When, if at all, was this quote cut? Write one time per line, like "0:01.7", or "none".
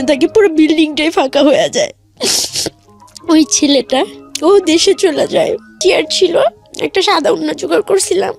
0:05.8